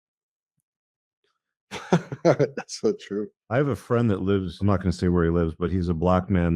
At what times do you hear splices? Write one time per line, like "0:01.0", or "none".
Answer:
0:03.4
0:04.5